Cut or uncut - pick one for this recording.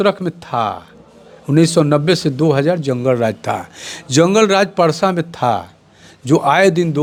uncut